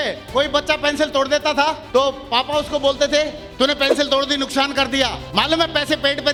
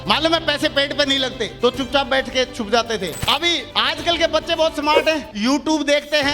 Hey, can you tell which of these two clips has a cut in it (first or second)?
second